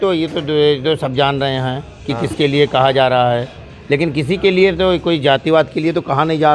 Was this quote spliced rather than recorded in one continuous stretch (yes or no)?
no